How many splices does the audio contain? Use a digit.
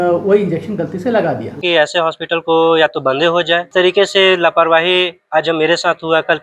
2